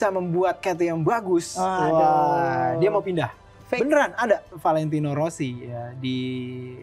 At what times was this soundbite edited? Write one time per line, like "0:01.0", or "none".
0:04.5